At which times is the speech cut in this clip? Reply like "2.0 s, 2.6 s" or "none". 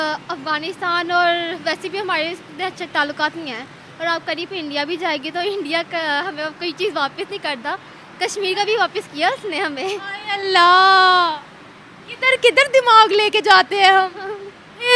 none

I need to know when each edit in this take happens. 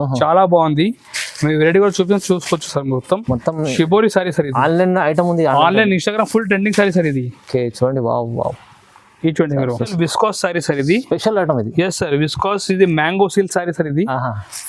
9.9 s

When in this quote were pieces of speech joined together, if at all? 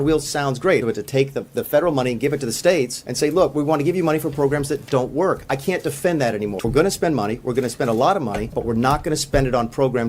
0.8 s, 3.0 s, 6.6 s, 8.5 s

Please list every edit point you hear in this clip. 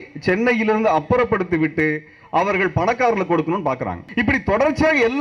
4.0 s

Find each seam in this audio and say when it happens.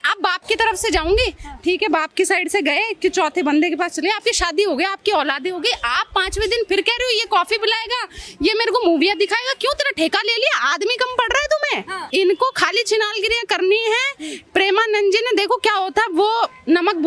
12.0 s

